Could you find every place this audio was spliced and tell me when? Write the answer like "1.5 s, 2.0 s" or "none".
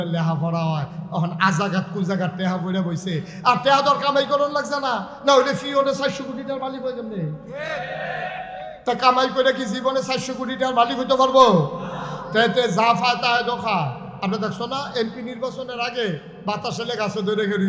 none